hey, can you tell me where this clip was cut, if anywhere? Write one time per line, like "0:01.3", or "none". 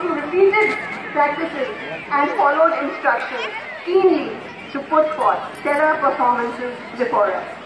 0:03.3